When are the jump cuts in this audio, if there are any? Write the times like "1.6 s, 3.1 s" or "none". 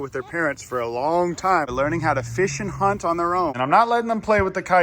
1.7 s, 3.6 s